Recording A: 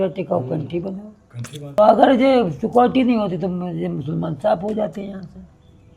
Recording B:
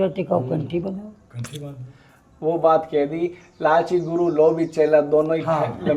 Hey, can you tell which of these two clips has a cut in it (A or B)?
A